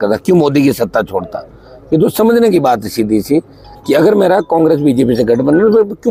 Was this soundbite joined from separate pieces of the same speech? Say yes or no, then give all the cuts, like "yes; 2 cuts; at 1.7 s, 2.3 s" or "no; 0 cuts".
no; 0 cuts